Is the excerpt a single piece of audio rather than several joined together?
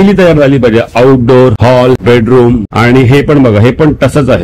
yes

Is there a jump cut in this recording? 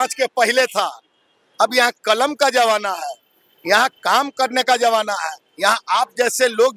no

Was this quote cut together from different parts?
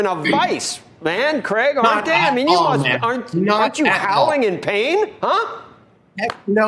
no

